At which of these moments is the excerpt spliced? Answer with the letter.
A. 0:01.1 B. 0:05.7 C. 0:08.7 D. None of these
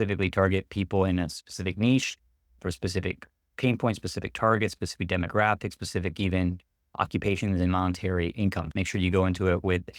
C